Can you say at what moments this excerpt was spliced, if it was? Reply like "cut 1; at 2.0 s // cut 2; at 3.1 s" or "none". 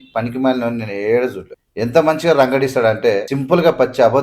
cut 1; at 1.5 s // cut 2; at 3.3 s